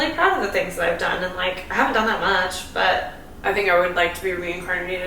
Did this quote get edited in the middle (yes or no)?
yes